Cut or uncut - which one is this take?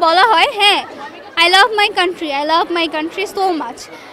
uncut